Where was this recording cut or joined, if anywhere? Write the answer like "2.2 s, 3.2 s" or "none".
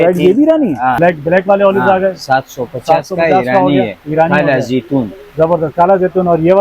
1.0 s